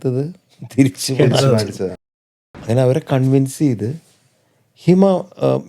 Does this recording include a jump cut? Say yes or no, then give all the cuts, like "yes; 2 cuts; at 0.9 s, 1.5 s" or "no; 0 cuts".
yes; 1 cut; at 2.1 s